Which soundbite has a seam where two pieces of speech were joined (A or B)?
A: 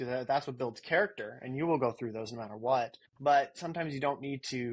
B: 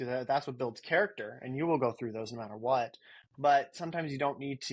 A